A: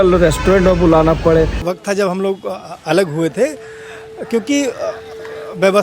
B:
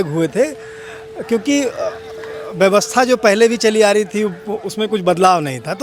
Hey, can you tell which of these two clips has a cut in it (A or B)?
A